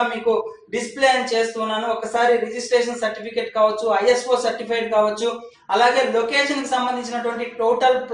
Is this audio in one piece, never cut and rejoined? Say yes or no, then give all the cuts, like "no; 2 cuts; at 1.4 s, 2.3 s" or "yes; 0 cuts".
yes; 0 cuts